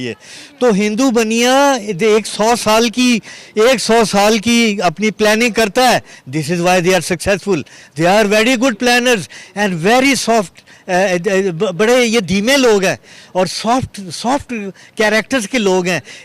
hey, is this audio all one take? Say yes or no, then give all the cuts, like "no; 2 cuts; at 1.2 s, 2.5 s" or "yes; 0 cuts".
no; 1 cut; at 6.2 s